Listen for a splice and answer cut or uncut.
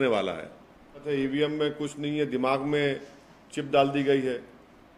cut